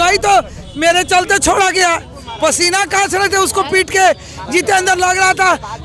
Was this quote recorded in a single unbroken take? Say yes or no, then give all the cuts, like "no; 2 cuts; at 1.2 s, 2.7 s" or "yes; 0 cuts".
yes; 0 cuts